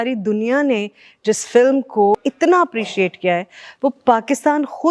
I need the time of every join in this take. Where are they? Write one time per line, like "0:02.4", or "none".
0:02.2

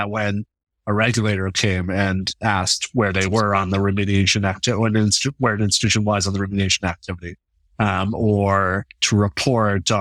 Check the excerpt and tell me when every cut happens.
none

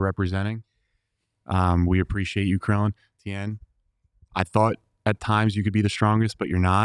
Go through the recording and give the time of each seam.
none

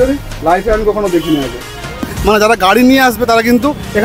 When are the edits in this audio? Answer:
0:02.1

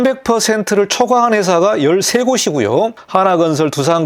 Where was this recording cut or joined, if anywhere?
0:03.0

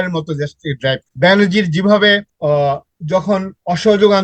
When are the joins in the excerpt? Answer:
0:01.1
0:02.3

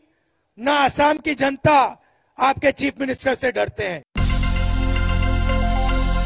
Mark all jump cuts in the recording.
0:04.1

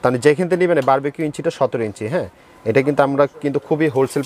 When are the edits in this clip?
none

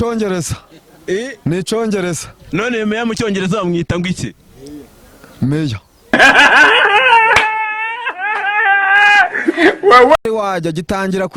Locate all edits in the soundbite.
0:10.2

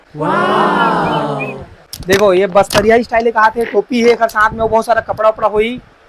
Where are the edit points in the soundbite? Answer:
0:01.5

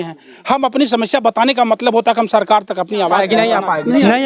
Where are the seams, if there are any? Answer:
0:03.2

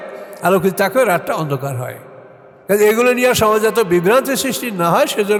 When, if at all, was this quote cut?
none

